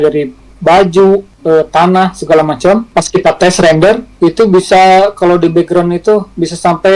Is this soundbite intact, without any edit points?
no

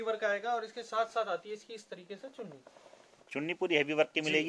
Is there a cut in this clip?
no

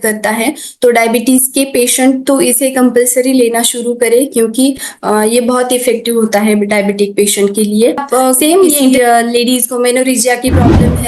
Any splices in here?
yes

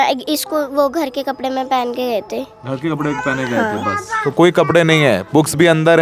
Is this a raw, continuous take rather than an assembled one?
yes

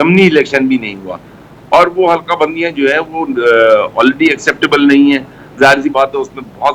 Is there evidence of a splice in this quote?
no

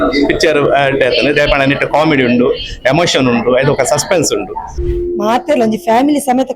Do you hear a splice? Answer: yes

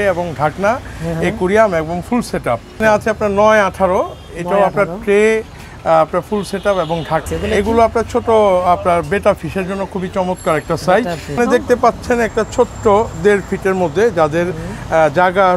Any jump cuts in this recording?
yes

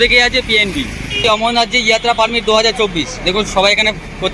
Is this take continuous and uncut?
no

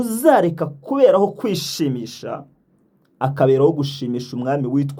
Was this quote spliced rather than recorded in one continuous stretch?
no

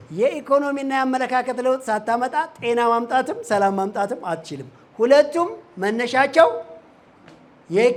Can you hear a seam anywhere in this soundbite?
no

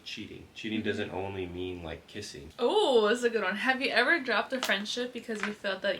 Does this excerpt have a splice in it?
yes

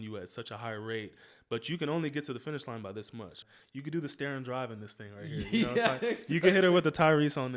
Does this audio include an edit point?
yes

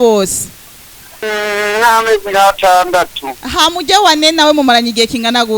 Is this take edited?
yes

